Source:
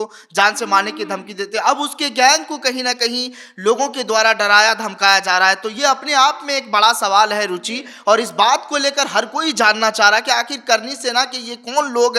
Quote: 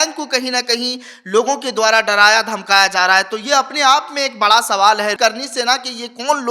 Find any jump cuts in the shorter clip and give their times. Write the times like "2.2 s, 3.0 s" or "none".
5.1 s